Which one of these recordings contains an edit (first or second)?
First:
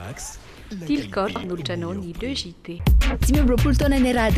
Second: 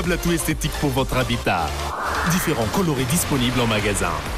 first